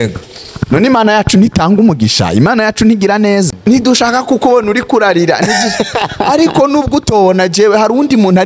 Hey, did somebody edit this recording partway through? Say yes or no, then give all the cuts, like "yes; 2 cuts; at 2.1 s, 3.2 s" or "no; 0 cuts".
yes; 1 cut; at 3.5 s